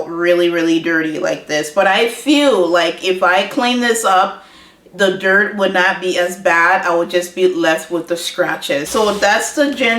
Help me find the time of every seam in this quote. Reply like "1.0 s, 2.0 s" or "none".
8.9 s